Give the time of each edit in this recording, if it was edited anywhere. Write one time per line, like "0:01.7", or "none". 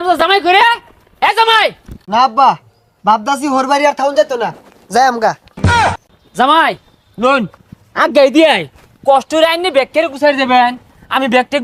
none